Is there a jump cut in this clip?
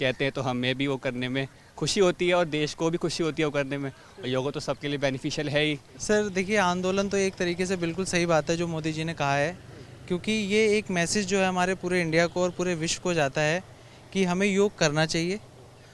no; 0 cuts

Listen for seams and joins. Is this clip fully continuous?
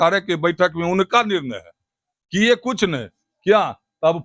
yes; 0 cuts

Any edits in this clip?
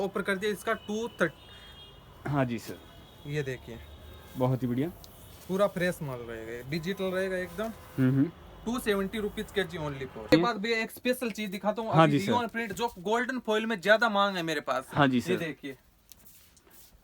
yes; 1 cut; at 10.3 s

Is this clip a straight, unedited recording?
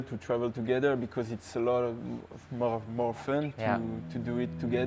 yes; 0 cuts

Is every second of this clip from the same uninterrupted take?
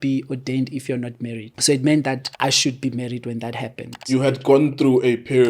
no; 3 cuts; at 1.5 s, 2.3 s, 4.1 s

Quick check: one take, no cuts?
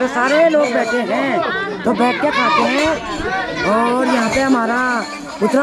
yes; 0 cuts

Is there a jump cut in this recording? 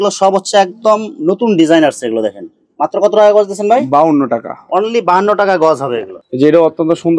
no; 0 cuts

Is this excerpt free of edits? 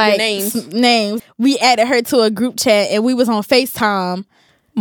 no; 1 cut; at 1.1 s

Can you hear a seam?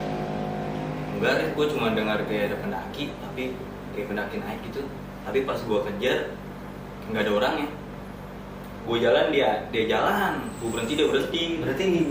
no; 0 cuts

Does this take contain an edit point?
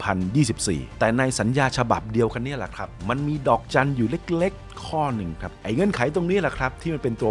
yes; 2 cuts; at 0.9 s, 5.4 s

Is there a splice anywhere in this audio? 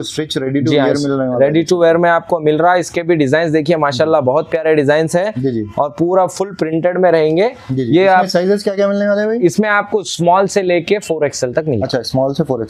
no; 0 cuts

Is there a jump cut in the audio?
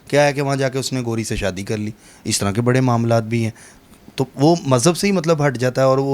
no; 0 cuts

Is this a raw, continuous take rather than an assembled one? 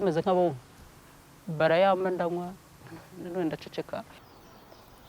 no; 1 cut; at 4.2 s

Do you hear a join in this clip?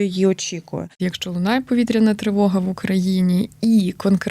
yes; 1 cut; at 1.0 s

